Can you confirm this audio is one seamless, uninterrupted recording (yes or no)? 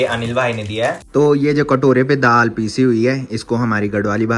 no